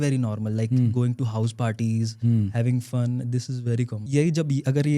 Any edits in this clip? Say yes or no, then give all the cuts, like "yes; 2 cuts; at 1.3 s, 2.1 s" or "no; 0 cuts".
yes; 1 cut; at 4.0 s